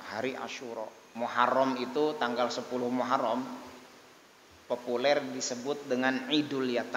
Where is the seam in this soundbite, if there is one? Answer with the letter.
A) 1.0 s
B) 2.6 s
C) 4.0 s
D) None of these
A